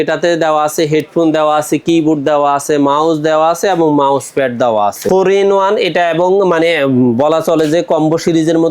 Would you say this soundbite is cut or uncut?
cut